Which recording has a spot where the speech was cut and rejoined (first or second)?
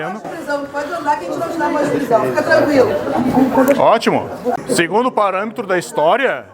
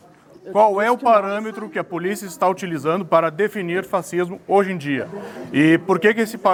first